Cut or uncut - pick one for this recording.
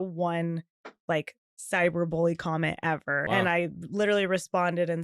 cut